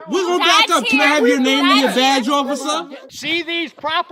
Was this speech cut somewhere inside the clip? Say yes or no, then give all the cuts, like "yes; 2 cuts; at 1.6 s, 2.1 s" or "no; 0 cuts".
yes; 1 cut; at 3.0 s